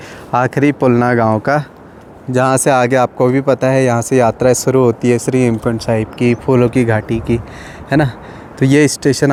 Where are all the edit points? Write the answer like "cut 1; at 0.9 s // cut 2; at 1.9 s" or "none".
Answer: none